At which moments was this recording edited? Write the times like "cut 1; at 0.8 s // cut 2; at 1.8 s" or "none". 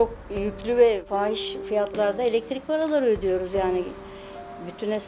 cut 1; at 1.0 s